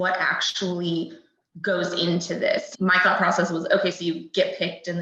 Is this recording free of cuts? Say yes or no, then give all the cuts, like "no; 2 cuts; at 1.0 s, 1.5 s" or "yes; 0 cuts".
no; 1 cut; at 2.7 s